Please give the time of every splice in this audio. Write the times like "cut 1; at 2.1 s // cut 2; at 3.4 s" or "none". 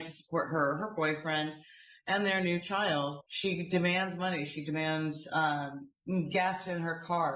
cut 1; at 3.3 s